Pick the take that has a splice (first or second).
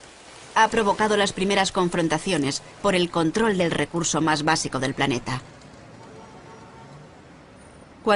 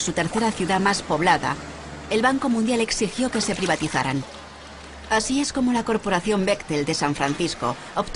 second